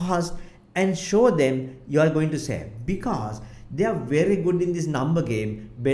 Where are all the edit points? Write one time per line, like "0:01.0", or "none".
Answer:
none